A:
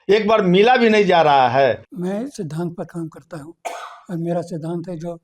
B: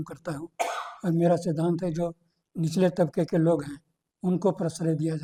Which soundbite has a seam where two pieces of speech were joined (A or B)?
A